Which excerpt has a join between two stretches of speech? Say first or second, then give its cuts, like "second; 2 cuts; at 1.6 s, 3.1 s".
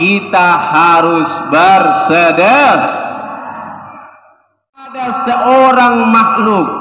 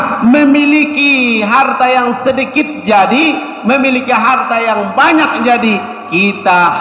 first; 1 cut; at 5.0 s